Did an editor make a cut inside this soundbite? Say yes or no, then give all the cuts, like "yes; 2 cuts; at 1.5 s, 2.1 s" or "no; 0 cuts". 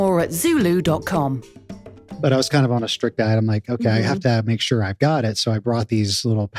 yes; 1 cut; at 2.0 s